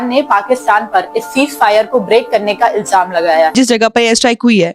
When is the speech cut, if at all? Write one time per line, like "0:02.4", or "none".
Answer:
0:03.5